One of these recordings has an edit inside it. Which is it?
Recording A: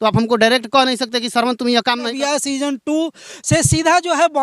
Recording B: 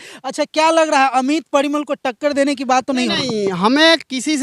A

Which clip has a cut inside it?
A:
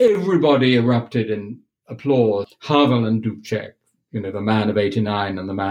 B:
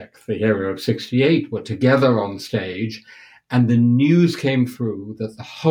A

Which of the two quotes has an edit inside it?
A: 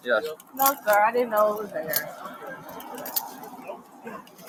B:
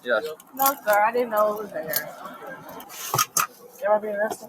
B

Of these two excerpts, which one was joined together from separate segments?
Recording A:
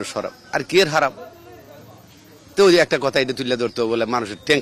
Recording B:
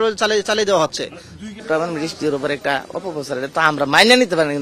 B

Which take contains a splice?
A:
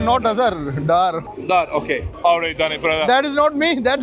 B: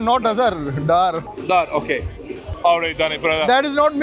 A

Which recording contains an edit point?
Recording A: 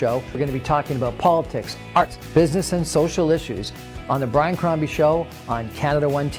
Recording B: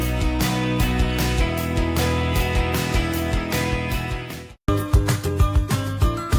A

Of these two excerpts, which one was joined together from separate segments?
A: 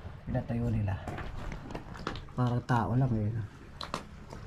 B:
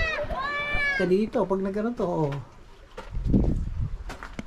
B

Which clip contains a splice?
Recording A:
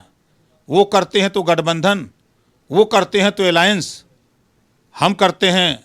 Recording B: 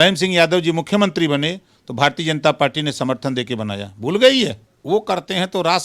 B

